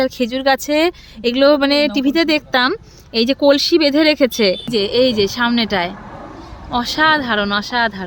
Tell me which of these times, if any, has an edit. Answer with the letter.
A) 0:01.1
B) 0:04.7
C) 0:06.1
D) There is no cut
B